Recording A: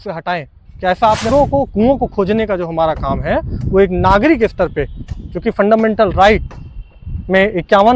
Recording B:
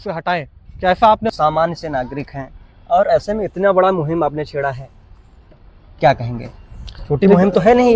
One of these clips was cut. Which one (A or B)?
A